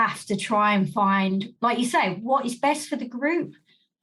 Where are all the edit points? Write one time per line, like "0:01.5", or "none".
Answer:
0:01.5